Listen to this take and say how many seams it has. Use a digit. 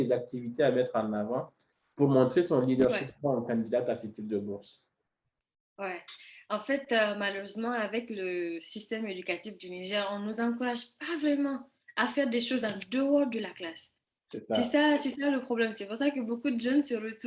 0